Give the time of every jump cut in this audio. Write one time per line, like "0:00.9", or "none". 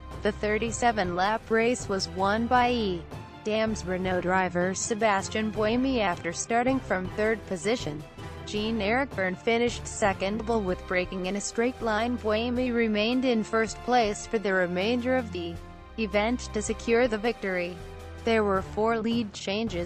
none